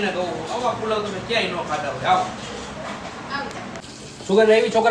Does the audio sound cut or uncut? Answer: cut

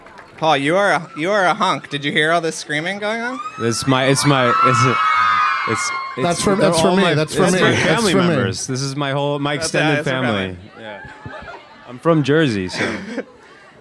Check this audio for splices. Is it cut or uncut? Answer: uncut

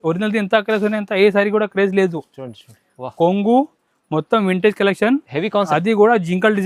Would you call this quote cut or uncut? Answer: uncut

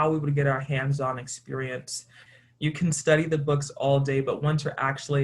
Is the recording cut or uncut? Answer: cut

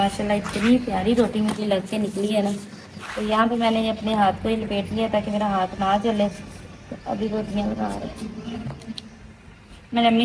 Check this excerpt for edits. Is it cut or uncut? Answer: uncut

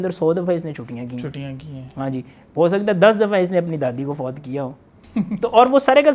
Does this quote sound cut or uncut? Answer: uncut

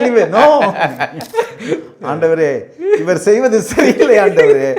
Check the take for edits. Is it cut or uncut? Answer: cut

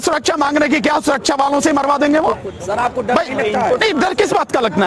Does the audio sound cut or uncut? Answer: uncut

